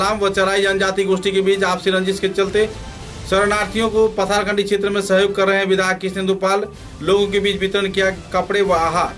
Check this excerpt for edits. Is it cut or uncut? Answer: uncut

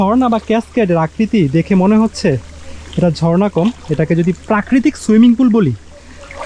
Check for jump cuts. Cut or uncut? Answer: uncut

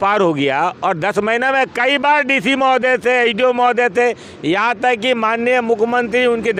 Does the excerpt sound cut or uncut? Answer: uncut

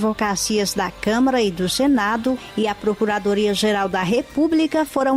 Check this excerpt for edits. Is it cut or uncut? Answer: uncut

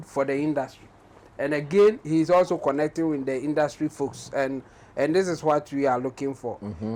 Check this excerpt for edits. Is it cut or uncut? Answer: uncut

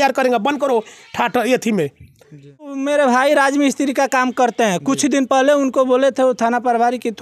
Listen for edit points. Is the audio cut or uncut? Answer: cut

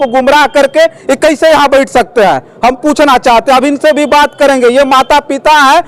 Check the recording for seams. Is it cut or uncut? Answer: uncut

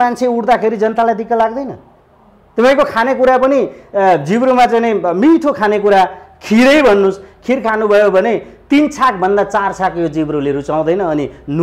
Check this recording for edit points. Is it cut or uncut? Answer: uncut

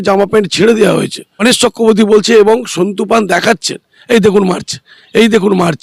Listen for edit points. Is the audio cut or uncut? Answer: uncut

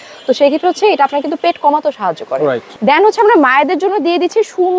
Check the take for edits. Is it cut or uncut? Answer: cut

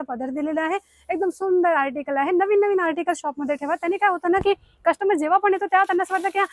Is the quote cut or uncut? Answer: uncut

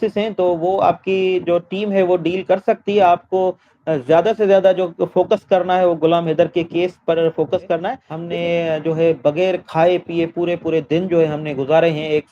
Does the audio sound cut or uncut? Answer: cut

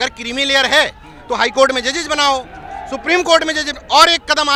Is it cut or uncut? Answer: uncut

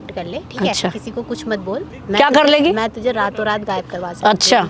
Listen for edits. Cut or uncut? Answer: cut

